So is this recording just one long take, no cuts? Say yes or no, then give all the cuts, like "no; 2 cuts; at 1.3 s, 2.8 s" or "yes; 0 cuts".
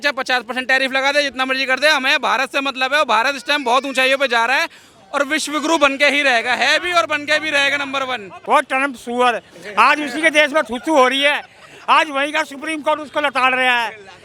yes; 0 cuts